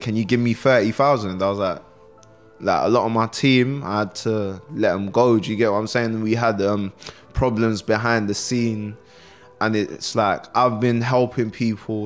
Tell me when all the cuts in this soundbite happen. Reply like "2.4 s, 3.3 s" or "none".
2.5 s